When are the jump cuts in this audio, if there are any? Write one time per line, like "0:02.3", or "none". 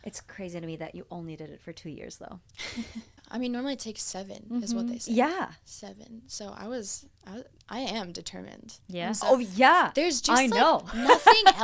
0:03.2